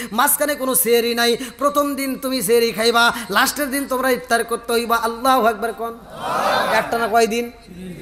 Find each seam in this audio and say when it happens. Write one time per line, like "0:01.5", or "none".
none